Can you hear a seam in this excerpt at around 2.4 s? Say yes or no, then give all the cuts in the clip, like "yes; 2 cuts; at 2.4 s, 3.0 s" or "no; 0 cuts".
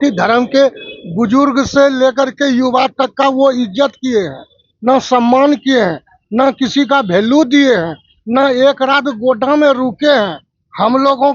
no; 0 cuts